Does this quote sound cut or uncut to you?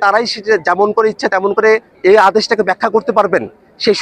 cut